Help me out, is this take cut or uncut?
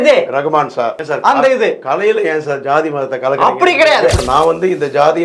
cut